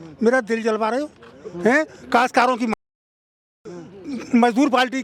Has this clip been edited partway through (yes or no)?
no